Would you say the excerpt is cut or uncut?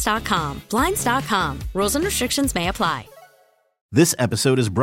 cut